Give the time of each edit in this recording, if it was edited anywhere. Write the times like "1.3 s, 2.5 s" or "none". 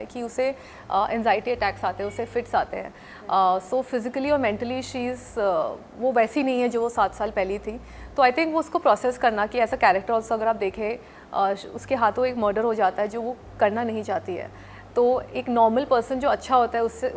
none